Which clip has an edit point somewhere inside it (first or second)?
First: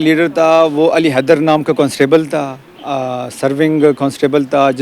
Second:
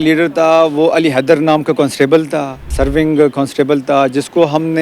second